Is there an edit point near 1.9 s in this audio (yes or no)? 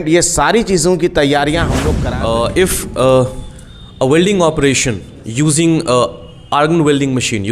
yes